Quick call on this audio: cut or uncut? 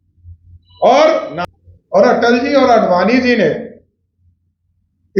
cut